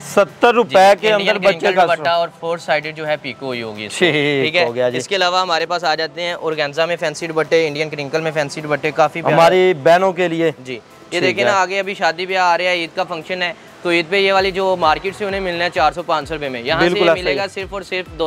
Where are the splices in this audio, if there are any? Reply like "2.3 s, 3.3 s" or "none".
none